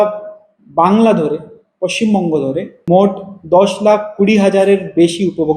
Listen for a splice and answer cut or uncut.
cut